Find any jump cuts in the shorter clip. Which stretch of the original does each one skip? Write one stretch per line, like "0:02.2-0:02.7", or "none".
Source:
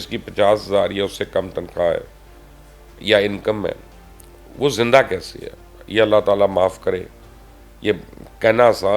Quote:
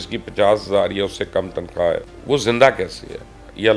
0:02.1-0:04.4